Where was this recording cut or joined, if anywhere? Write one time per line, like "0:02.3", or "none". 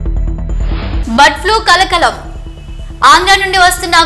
none